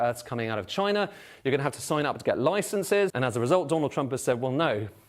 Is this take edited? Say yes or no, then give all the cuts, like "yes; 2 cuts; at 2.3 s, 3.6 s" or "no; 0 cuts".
yes; 1 cut; at 3.1 s